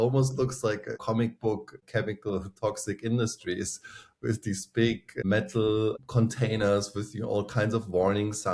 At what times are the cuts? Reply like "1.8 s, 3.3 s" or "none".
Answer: 1.0 s, 1.8 s, 5.1 s, 6.0 s